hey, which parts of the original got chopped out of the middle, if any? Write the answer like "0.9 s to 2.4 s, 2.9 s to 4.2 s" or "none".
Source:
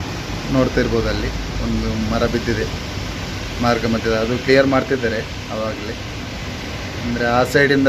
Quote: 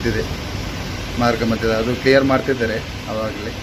none